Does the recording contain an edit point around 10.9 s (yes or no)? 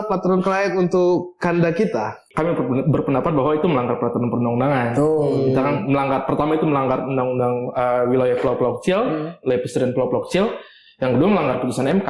no